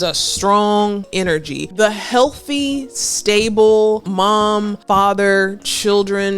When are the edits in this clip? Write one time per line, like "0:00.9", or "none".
0:01.4